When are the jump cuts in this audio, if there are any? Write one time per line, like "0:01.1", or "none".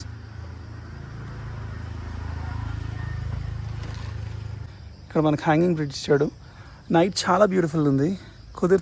0:04.7